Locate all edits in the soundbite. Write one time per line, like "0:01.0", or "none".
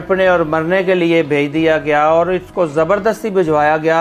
none